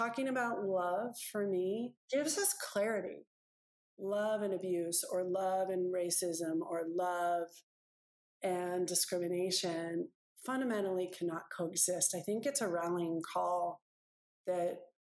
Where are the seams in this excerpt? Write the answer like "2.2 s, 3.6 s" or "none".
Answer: 2.0 s